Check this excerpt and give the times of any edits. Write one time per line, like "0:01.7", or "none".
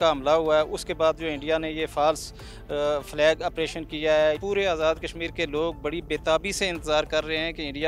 0:04.4
0:07.1